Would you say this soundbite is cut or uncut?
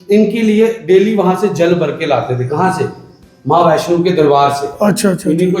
uncut